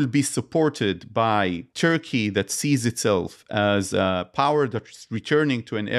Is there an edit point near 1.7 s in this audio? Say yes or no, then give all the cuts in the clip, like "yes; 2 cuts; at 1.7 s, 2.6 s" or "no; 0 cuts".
yes; 1 cut; at 1.7 s